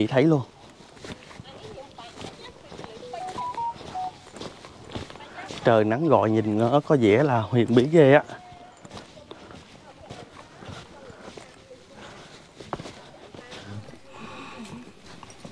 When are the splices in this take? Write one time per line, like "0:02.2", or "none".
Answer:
0:13.6